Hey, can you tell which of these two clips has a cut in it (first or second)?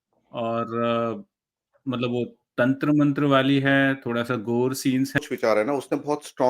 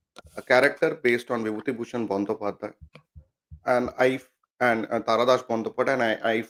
first